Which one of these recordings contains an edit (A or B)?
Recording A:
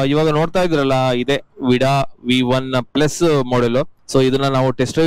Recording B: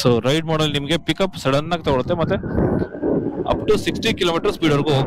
A